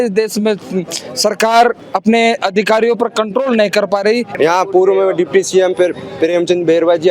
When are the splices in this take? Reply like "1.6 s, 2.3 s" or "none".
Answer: 4.3 s

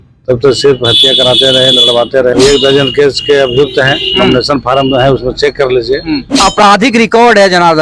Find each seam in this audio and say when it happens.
2.3 s, 6.3 s

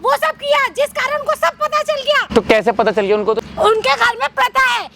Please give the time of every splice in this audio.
2.2 s, 3.4 s

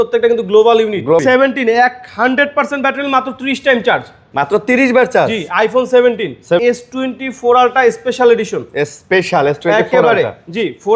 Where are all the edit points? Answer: 1.2 s, 6.6 s

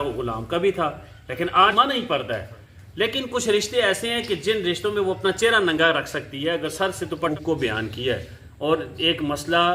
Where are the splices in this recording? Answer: 1.7 s, 7.3 s

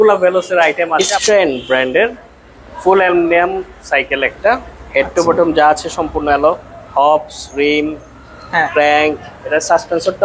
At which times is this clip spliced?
1.1 s

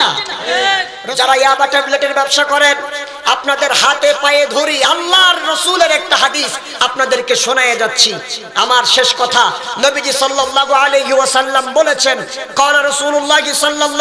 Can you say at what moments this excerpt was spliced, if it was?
0.9 s

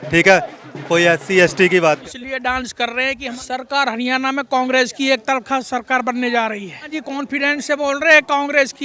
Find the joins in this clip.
2.0 s, 3.4 s, 6.9 s

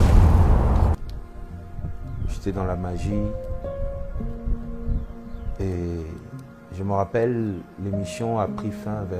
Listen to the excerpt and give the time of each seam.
0.9 s

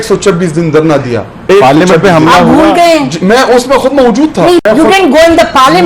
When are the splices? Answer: 4.6 s

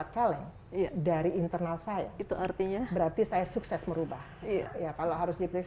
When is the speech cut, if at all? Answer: 4.7 s

